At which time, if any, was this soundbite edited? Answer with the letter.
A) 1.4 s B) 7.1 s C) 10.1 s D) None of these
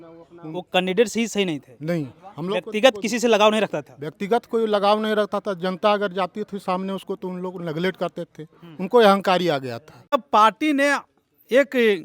C